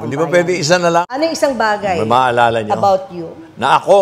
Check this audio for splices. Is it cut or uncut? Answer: cut